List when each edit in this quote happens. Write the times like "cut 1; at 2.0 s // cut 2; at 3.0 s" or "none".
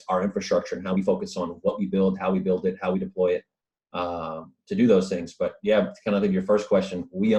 none